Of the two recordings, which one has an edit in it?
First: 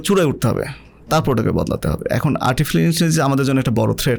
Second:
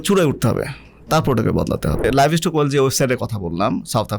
second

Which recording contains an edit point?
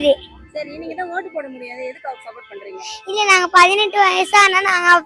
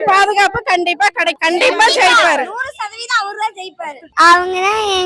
second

